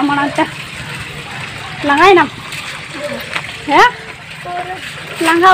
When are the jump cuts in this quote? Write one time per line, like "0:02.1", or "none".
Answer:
none